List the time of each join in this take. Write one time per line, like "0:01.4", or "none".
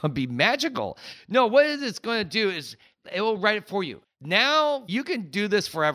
0:03.0
0:04.0
0:04.9